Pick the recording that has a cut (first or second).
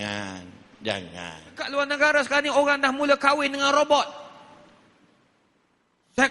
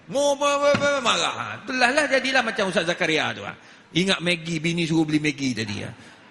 first